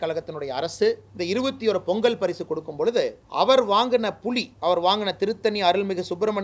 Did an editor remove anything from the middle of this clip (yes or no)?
yes